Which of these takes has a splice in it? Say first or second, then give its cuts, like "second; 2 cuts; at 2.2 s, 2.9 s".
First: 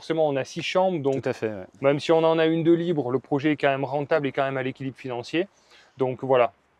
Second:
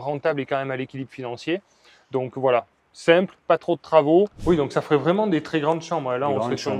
second; 1 cut; at 4.4 s